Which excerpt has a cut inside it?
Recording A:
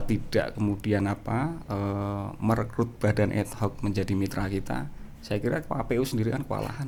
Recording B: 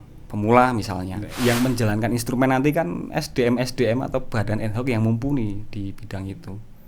B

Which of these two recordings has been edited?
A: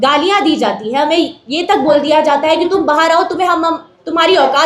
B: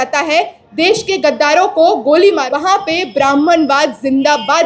B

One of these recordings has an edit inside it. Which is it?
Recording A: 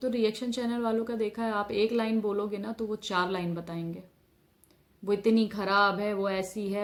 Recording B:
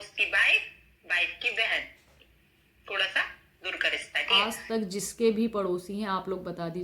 B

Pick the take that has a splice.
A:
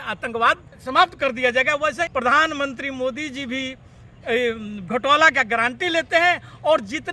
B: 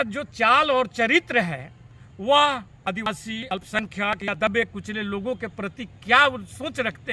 A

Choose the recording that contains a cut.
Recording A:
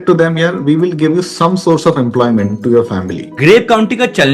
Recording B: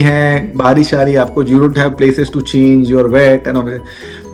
A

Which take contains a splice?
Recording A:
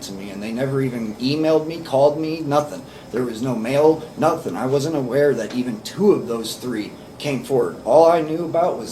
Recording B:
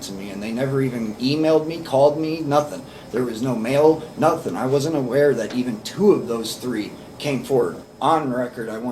B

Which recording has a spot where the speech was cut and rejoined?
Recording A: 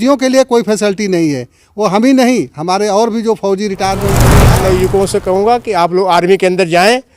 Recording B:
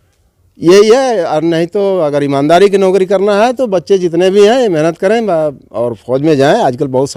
A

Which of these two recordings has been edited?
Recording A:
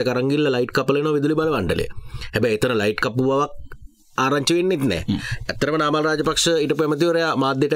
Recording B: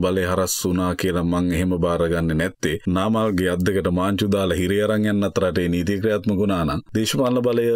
B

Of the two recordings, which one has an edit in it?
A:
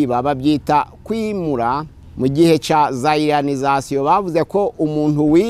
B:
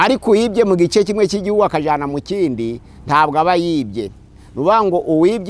A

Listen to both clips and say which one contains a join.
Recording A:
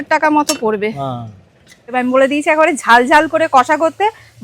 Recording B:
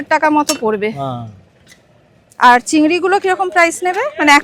A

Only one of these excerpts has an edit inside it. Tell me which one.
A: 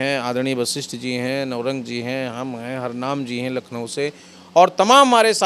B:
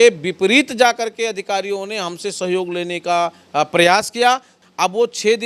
B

